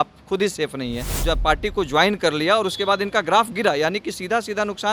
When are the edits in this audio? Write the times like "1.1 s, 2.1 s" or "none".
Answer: 1.1 s